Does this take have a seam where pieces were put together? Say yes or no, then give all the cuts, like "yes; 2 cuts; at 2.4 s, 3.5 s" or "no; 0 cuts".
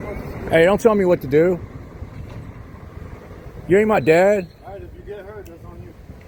no; 0 cuts